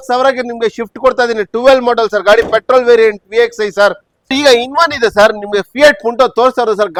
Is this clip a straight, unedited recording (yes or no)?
yes